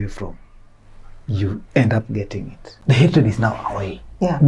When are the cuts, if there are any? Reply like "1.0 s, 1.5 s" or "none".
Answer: 2.6 s